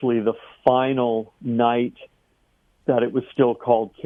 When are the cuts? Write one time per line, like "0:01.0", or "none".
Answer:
none